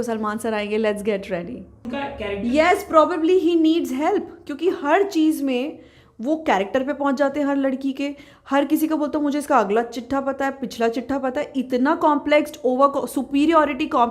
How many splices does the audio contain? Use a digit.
1